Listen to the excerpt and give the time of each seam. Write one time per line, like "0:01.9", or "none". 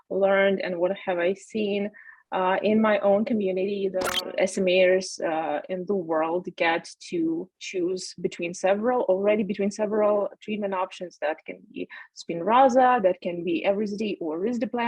0:04.1